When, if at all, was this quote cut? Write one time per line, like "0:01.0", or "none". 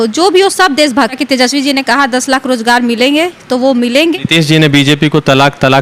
0:01.1
0:04.2

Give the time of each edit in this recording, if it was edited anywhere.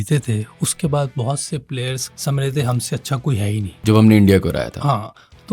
0:02.1
0:03.8

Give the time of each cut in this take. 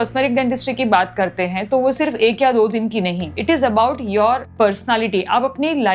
0:03.3

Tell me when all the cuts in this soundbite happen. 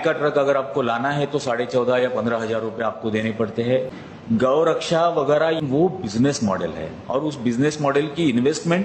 0:04.0
0:05.6

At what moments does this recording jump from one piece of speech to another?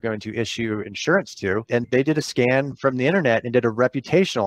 none

